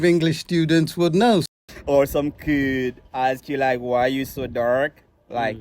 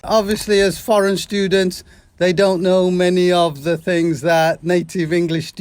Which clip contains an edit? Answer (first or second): first